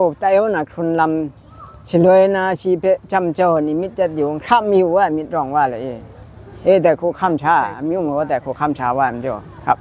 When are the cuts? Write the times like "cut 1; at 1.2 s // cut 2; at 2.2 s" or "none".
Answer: none